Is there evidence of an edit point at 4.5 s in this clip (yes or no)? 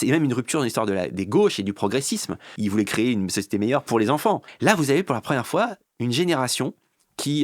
yes